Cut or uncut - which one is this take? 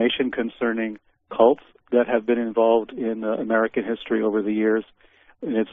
uncut